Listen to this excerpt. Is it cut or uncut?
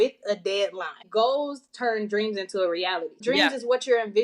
cut